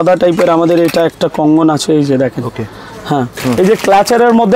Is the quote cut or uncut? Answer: cut